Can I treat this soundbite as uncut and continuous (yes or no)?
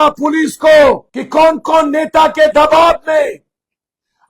no